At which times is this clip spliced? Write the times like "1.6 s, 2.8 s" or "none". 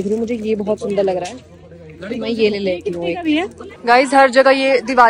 none